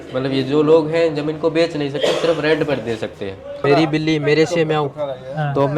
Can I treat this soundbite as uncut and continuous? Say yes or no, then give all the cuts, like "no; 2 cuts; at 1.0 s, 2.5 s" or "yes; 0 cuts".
no; 1 cut; at 3.6 s